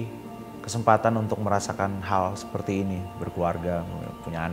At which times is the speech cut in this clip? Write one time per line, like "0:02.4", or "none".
none